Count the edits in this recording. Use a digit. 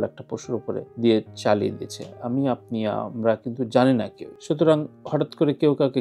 0